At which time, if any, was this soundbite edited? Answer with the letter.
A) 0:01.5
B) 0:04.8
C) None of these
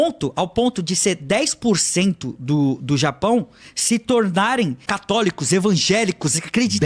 B